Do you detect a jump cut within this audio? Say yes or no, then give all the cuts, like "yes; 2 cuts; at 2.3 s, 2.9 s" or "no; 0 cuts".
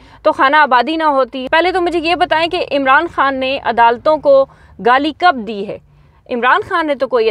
yes; 1 cut; at 1.4 s